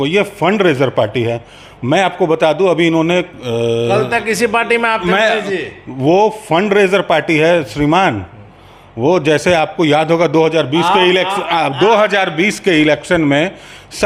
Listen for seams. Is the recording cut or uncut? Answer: uncut